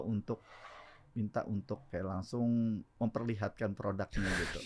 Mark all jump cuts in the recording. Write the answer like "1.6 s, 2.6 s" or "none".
1.9 s, 2.9 s